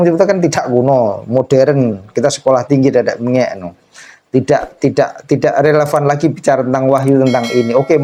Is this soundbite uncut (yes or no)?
yes